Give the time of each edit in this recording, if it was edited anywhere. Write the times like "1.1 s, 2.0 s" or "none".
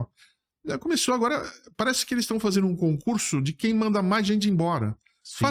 none